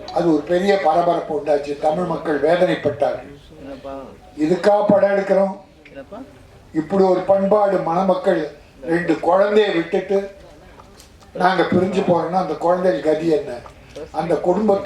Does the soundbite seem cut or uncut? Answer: uncut